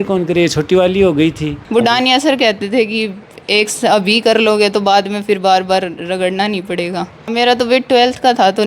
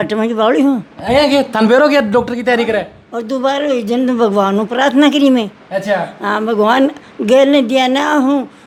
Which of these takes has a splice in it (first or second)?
first